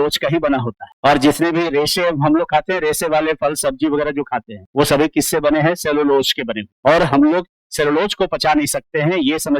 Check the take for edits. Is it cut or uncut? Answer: uncut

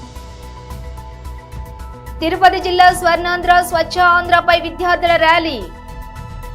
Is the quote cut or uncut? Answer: cut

